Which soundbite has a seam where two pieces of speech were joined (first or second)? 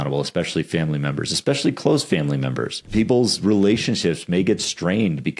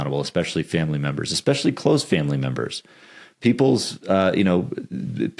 first